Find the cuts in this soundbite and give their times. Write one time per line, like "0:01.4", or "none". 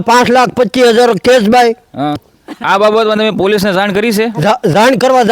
0:02.2